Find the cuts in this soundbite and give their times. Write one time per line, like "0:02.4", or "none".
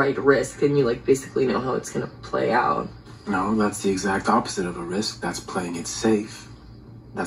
none